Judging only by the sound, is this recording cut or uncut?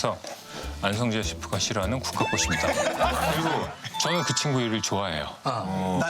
cut